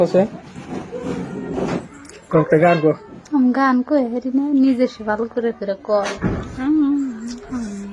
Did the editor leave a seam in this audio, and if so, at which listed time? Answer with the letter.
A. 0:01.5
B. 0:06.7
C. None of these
A